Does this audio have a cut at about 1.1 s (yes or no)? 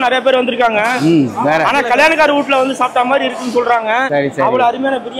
no